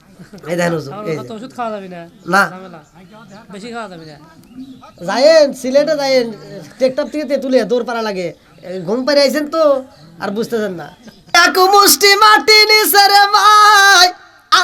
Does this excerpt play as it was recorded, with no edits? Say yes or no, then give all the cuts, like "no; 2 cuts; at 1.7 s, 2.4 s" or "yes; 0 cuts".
no; 1 cut; at 11.3 s